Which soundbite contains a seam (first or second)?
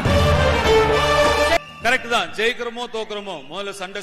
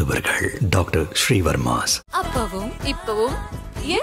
first